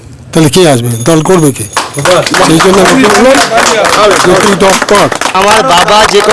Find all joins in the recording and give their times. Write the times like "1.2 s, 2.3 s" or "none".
5.3 s